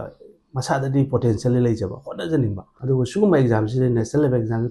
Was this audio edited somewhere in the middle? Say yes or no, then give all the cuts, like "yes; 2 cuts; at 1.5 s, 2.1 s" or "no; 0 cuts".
yes; 1 cut; at 2.7 s